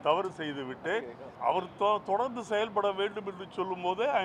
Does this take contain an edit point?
yes; 1 cut; at 1.2 s

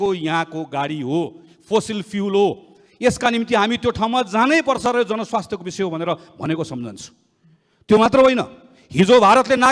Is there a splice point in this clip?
no; 0 cuts

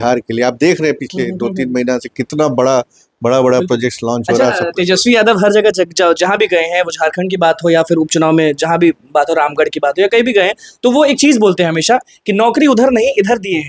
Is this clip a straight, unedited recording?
yes; 0 cuts

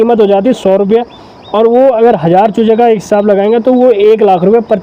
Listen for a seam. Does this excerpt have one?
no; 0 cuts

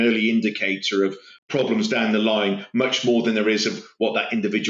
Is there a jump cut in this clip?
yes; 1 cut; at 1.3 s

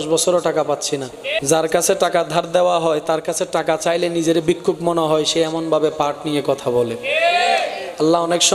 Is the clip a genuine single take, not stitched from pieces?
no; 1 cut; at 1.3 s

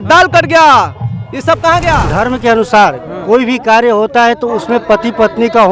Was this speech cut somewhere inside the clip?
yes; 1 cut; at 2.1 s

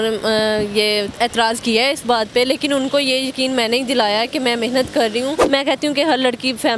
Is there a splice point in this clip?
yes; 1 cut; at 5.4 s

